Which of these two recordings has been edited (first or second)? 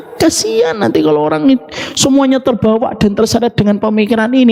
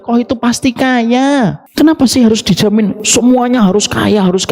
second